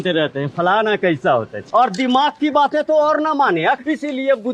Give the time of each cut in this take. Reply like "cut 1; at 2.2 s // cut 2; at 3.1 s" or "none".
cut 1; at 1.6 s // cut 2; at 3.8 s